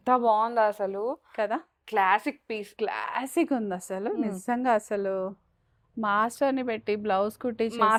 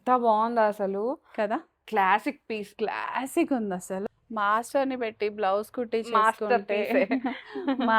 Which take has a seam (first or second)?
second